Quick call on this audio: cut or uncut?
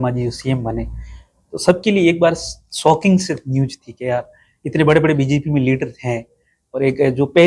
uncut